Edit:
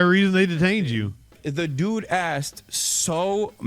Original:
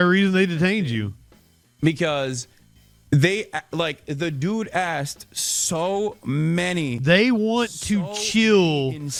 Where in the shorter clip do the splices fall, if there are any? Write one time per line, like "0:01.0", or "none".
0:01.4